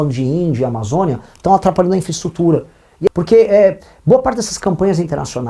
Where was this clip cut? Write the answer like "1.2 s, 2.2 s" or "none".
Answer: 3.1 s